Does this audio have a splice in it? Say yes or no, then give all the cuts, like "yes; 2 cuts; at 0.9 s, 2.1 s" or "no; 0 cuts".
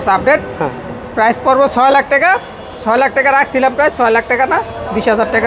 no; 0 cuts